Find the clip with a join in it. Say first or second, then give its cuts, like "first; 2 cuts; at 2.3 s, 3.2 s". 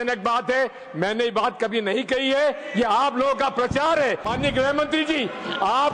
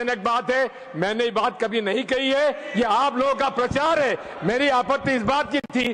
first; 1 cut; at 4.3 s